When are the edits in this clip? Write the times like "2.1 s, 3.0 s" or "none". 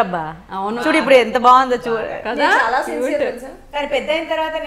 none